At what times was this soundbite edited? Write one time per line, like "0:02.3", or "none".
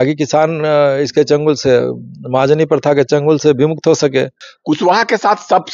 0:04.5